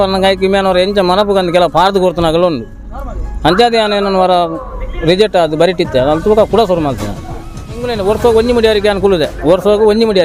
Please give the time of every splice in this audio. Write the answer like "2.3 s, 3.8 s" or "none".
7.7 s